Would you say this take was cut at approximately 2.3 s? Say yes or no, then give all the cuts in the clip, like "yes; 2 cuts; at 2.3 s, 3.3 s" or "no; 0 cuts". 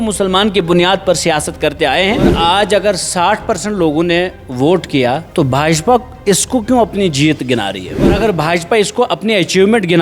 yes; 2 cuts; at 2.3 s, 8.2 s